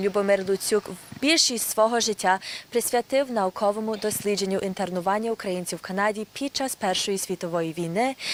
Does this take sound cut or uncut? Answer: uncut